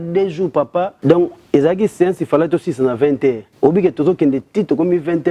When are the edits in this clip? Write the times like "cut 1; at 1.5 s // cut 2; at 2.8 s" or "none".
cut 1; at 0.9 s // cut 2; at 3.5 s